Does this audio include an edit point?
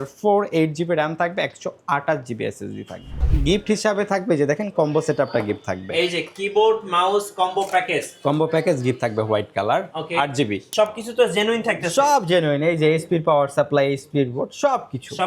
yes; 2 cuts; at 3.3 s, 10.7 s

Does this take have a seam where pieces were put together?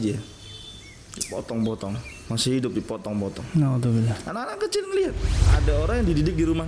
yes; 1 cut; at 5.4 s

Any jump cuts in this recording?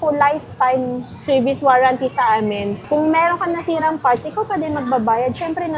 no; 0 cuts

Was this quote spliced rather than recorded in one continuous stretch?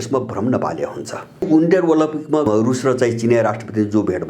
yes; 2 cuts; at 1.4 s, 2.5 s

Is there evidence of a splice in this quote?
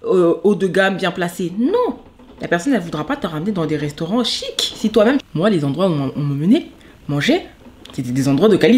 yes; 1 cut; at 5.3 s

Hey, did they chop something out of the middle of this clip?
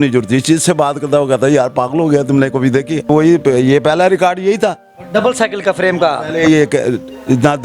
yes; 1 cut; at 3.1 s

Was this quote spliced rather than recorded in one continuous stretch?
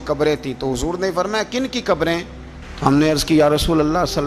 no; 0 cuts

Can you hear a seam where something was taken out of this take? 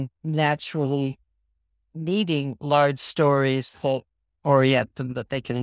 no; 0 cuts

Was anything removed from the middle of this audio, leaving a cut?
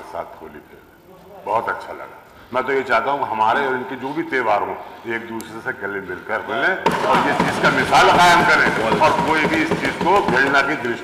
no; 0 cuts

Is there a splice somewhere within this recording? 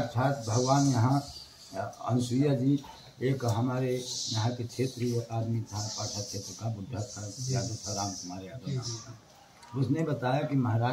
no; 0 cuts

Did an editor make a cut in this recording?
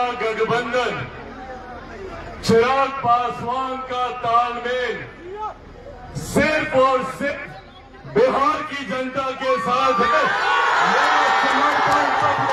no; 0 cuts

